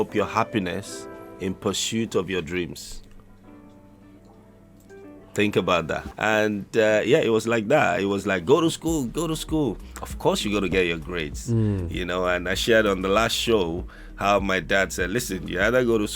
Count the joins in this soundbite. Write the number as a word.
one